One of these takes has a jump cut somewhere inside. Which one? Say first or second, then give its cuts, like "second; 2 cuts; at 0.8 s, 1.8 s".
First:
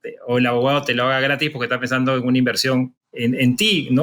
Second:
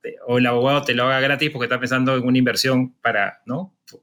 first; 1 cut; at 2.9 s